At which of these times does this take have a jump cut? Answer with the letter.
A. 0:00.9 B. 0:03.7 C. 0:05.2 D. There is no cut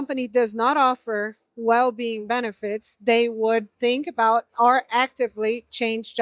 B